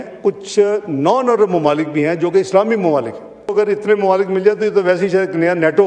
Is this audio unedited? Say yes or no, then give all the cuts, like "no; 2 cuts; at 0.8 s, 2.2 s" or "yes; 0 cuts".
no; 1 cut; at 3.5 s